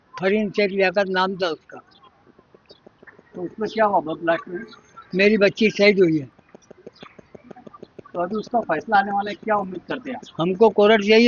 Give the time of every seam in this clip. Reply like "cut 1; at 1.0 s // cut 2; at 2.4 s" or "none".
none